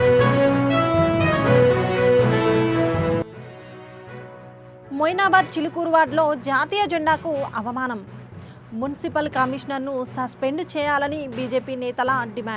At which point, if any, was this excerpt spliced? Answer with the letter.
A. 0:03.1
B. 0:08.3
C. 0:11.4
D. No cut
D